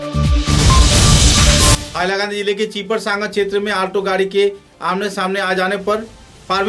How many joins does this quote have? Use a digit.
1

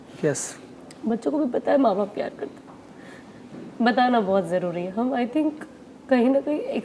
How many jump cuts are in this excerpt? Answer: 0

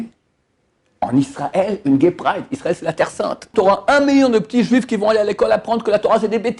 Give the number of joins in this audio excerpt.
1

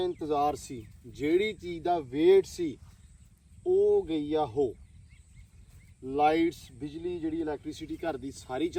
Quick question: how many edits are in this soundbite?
0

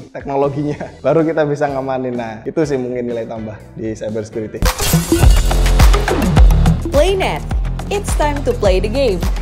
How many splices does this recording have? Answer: 1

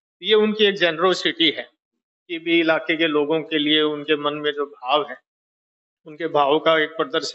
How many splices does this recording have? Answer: 0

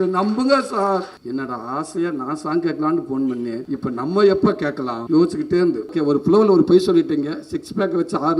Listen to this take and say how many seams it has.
4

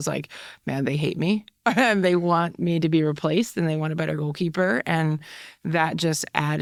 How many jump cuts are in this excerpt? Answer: 0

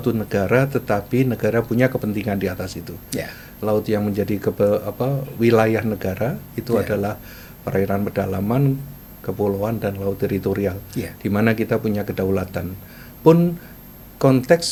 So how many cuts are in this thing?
0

